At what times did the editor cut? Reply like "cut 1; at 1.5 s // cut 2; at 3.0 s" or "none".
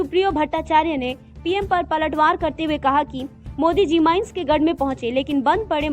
none